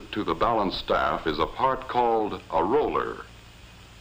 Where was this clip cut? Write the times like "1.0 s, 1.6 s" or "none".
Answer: 1.5 s